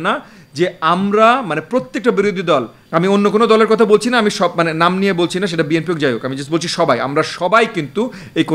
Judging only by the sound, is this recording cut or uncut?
cut